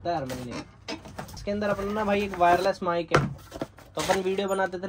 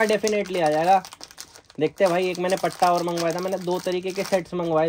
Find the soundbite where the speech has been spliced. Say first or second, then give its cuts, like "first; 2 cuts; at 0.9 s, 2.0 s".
first; 1 cut; at 1.3 s